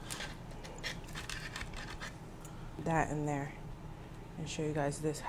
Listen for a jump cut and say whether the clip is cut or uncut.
cut